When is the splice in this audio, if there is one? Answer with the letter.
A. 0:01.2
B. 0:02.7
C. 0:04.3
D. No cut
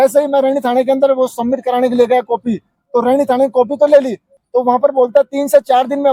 C